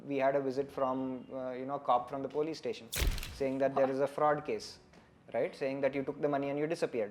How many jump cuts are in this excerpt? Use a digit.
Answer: 0